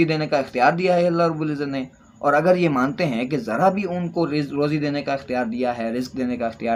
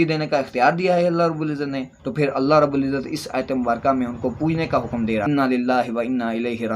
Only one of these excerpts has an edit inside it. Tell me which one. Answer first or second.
second